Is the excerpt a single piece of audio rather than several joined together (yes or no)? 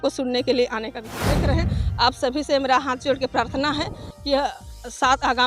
no